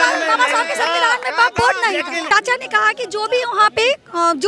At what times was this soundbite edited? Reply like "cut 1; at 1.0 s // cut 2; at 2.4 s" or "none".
cut 1; at 2.3 s